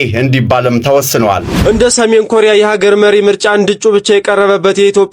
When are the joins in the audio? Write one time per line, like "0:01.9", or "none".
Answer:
0:01.5